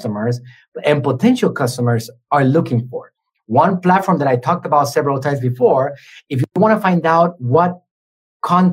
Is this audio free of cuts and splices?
yes; 0 cuts

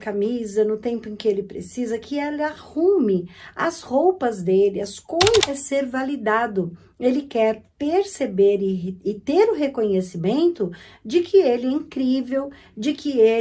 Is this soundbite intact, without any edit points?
no; 1 cut; at 5.5 s

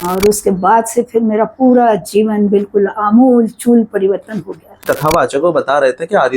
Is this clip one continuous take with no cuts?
no; 1 cut; at 4.8 s

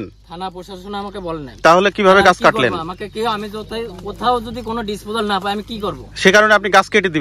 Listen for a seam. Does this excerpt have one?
no; 0 cuts

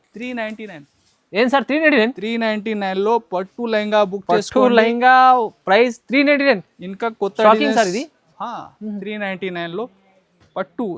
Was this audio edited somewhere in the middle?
no; 0 cuts

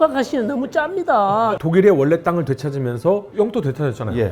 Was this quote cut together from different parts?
yes; 2 cuts; at 1.5 s, 3.3 s

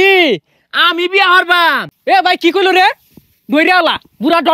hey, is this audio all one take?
no; 1 cut; at 1.9 s

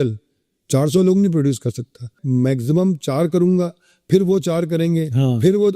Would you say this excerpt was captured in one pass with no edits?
no; 1 cut; at 2.2 s

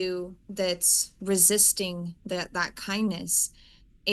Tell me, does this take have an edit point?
no; 0 cuts

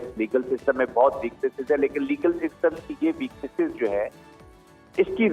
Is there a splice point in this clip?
no; 0 cuts

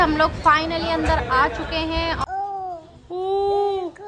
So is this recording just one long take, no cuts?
no; 1 cut; at 2.2 s

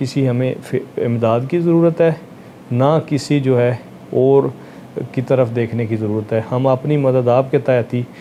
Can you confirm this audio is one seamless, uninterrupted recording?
yes; 0 cuts

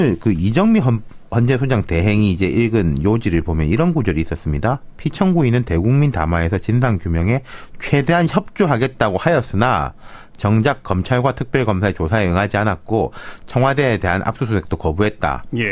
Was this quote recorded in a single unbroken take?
yes; 0 cuts

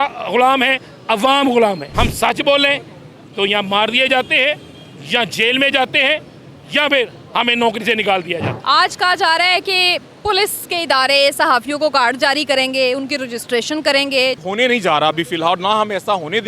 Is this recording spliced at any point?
yes; 3 cuts; at 1.9 s, 8.5 s, 14.4 s

